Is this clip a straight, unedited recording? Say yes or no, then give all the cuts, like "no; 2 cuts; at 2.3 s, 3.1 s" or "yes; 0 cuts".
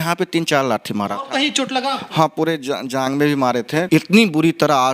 no; 1 cut; at 3.9 s